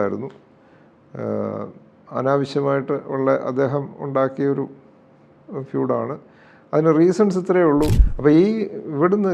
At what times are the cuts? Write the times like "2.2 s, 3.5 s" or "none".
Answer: 8.0 s